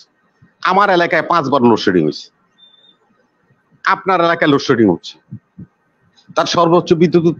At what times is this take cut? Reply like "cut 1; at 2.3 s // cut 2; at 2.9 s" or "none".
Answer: none